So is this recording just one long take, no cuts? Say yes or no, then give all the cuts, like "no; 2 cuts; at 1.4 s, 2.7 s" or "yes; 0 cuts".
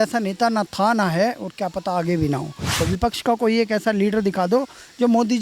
no; 1 cut; at 2.7 s